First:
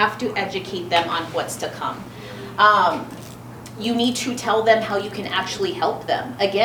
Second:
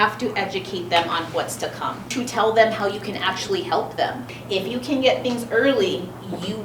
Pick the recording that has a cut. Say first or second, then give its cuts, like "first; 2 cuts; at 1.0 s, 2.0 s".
second; 2 cuts; at 2.1 s, 4.2 s